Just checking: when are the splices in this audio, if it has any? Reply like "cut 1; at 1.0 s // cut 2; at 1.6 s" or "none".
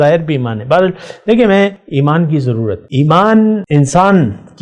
cut 1; at 1.8 s // cut 2; at 2.8 s // cut 3; at 3.6 s